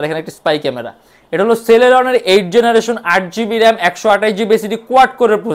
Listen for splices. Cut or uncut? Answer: uncut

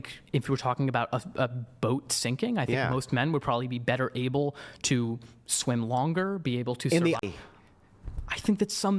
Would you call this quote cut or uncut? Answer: cut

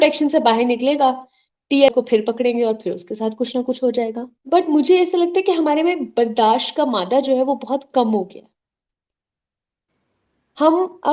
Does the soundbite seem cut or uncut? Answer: cut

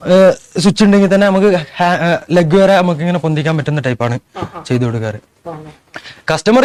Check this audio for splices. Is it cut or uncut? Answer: uncut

